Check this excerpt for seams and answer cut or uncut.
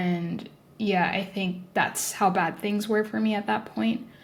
uncut